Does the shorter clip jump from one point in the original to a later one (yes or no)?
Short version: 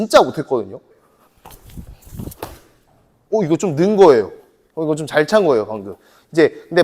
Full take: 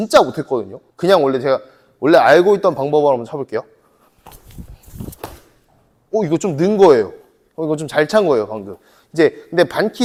yes